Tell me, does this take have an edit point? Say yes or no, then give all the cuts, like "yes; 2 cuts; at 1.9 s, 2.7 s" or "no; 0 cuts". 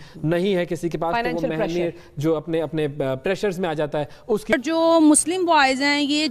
yes; 1 cut; at 4.5 s